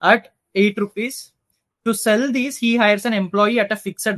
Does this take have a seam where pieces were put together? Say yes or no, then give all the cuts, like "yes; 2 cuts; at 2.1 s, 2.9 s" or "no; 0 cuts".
no; 0 cuts